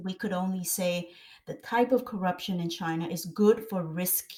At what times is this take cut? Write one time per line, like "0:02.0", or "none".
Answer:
none